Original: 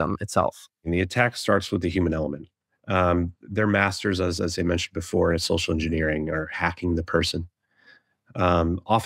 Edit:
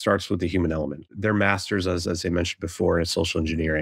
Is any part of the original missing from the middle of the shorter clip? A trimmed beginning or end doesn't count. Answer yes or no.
yes